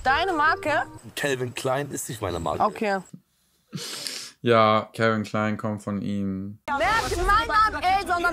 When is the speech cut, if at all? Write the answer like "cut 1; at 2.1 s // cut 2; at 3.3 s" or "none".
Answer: cut 1; at 1.1 s // cut 2; at 6.6 s